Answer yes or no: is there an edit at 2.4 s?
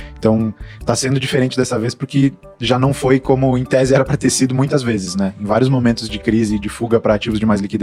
no